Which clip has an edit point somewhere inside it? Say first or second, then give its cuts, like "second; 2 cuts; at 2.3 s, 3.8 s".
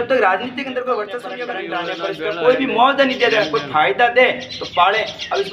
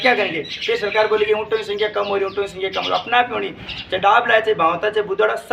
first; 1 cut; at 1.5 s